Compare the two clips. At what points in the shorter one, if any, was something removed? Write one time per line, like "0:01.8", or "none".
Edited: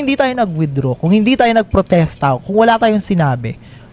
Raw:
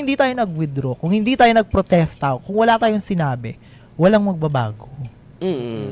none